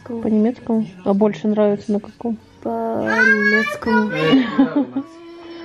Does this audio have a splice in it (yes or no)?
no